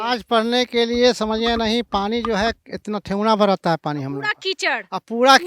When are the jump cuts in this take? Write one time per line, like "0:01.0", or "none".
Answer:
none